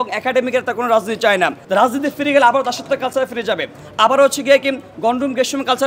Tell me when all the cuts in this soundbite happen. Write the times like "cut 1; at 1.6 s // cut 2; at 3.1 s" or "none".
cut 1; at 1.6 s